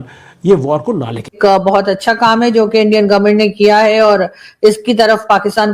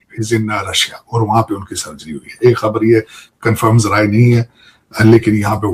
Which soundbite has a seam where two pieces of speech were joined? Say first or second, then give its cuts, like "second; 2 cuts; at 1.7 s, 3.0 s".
first; 1 cut; at 1.3 s